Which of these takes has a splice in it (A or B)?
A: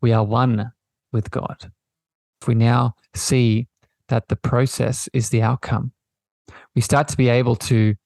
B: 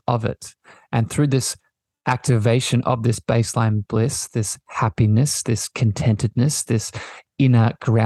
A